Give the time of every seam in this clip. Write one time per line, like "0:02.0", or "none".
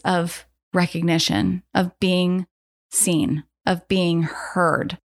none

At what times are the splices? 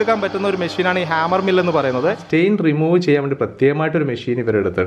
0:02.2

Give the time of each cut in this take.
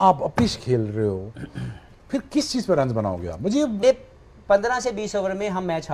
0:03.8

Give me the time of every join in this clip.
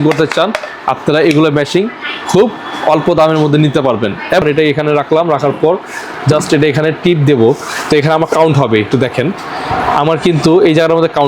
0:04.4

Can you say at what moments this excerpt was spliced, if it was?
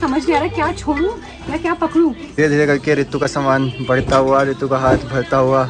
0:02.2

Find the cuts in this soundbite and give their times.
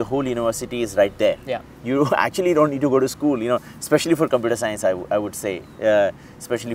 none

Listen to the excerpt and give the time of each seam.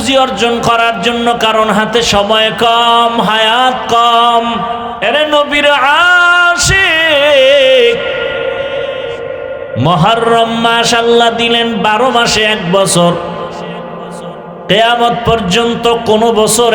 0:04.9

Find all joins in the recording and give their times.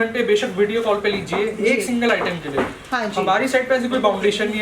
none

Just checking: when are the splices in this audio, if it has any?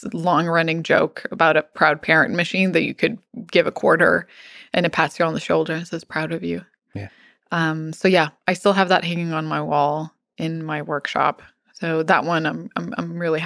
none

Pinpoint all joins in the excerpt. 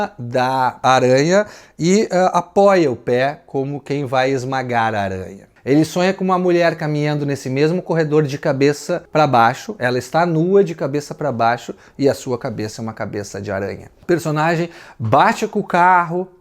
0:05.4
0:13.9

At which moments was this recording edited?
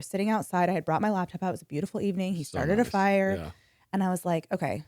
none

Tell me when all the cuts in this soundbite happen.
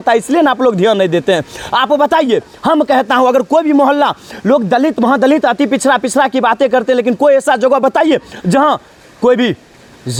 none

